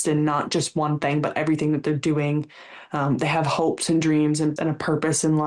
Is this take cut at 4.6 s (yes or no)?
yes